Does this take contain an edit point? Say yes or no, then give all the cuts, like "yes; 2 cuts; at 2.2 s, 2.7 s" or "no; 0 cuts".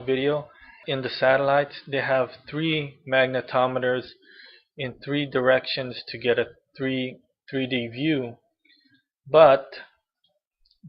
yes; 1 cut; at 3.0 s